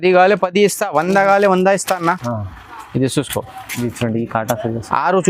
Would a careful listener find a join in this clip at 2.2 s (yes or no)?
yes